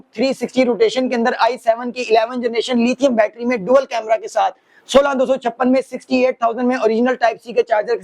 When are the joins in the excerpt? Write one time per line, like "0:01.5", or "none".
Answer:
none